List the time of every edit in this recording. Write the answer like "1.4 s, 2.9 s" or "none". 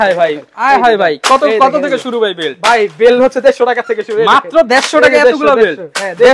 none